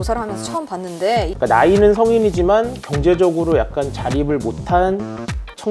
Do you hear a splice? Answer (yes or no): yes